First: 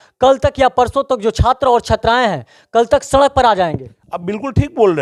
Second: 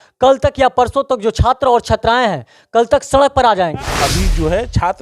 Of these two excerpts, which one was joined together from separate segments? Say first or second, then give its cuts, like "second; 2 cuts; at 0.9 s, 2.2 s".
second; 1 cut; at 3.9 s